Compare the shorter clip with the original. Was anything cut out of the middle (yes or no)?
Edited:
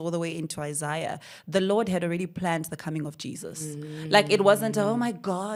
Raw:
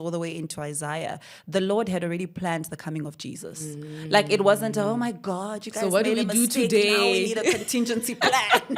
no